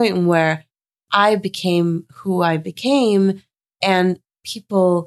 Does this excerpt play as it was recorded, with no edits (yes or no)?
yes